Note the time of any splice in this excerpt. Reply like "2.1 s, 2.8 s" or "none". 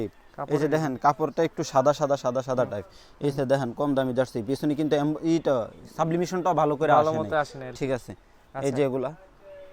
none